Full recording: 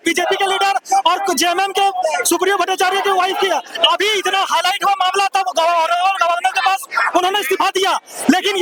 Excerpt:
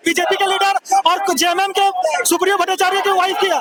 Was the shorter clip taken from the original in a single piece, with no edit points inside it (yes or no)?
yes